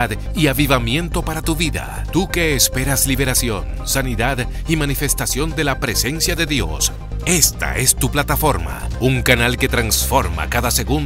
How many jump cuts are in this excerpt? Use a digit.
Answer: 0